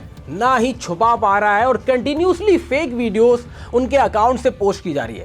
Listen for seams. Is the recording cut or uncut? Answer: uncut